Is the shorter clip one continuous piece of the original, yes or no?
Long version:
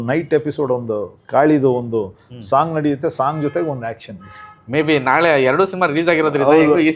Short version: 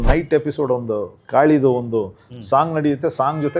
yes